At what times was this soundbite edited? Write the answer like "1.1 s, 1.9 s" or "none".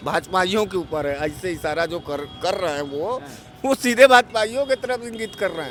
none